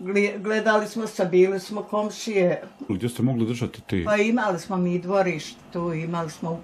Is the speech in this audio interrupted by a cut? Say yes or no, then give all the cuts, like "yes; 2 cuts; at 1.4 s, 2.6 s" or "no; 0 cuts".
yes; 1 cut; at 2.9 s